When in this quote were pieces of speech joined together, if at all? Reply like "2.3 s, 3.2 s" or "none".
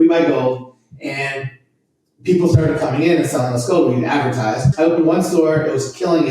4.7 s